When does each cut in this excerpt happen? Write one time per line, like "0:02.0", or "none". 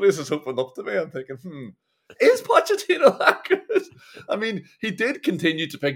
none